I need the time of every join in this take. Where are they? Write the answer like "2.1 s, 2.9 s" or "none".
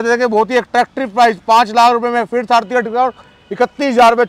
none